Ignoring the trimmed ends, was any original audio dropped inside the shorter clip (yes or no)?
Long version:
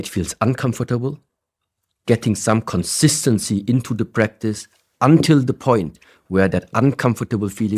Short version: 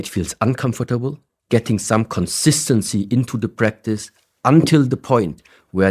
yes